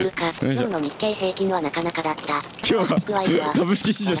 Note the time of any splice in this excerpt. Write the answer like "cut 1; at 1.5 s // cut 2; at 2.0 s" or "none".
cut 1; at 2.6 s